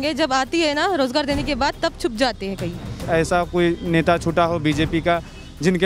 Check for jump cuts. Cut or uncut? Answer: cut